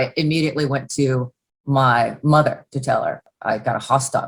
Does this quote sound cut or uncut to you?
cut